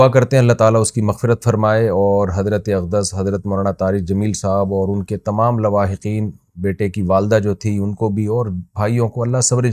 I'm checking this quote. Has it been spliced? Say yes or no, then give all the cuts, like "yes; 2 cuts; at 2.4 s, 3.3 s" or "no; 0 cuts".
no; 0 cuts